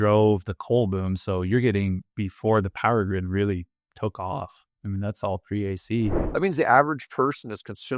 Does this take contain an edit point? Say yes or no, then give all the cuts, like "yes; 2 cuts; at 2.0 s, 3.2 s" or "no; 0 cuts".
yes; 1 cut; at 6.2 s